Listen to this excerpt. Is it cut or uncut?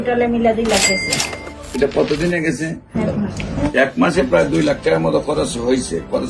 cut